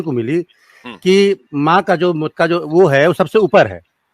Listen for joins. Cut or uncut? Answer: cut